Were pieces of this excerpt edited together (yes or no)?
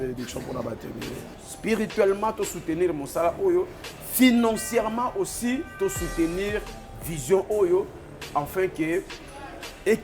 yes